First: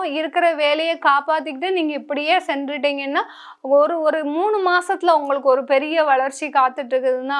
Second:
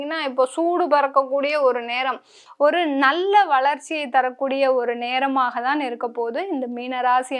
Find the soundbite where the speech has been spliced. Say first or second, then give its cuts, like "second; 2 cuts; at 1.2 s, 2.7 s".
second; 1 cut; at 2.4 s